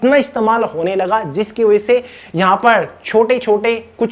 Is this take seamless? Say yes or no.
yes